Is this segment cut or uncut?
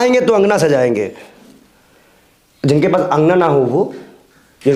uncut